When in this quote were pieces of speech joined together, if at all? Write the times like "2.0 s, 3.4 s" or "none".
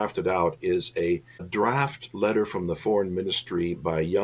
1.5 s